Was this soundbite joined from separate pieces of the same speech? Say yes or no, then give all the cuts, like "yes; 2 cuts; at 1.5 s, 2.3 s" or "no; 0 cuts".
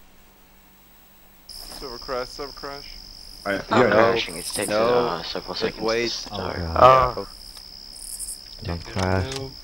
yes; 1 cut; at 6.2 s